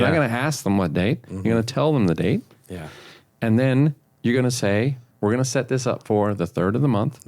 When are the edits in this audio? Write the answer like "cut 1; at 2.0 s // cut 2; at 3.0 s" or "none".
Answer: cut 1; at 5.0 s